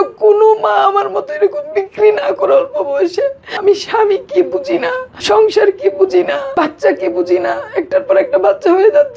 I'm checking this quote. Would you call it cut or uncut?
cut